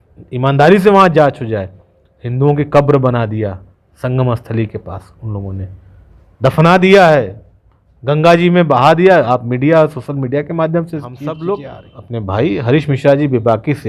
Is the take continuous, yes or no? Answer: no